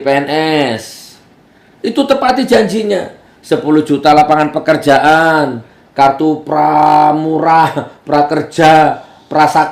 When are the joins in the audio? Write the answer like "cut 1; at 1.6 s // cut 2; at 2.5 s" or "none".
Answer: none